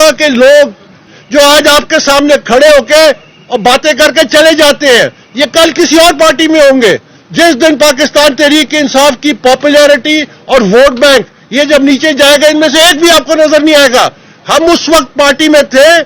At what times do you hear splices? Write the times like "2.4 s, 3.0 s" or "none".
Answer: 1.1 s